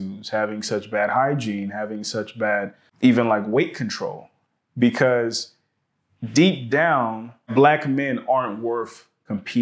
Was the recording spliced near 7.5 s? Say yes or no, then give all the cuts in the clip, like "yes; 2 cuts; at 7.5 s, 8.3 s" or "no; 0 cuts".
yes; 2 cuts; at 2.8 s, 7.5 s